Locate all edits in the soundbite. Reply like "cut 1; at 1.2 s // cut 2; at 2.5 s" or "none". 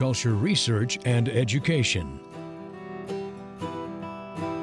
cut 1; at 2.1 s